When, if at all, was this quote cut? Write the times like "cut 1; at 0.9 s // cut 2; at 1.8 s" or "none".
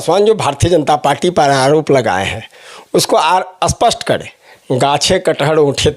cut 1; at 4.4 s